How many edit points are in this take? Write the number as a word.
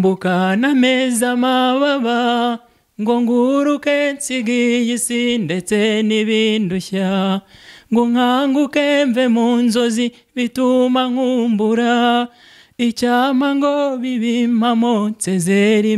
zero